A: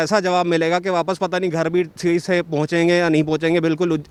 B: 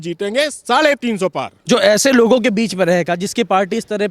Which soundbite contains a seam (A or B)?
B